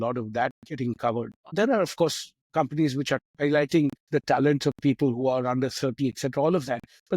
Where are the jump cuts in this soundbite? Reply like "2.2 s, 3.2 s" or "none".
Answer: 1.5 s, 3.2 s